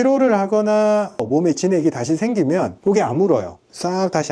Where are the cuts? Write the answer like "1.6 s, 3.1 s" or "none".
1.2 s